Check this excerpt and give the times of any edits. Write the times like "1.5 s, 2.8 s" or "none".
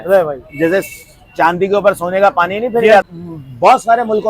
3.0 s